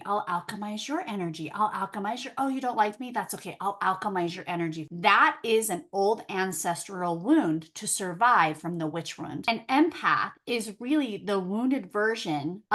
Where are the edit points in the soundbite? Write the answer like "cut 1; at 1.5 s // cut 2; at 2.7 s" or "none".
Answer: cut 1; at 9.4 s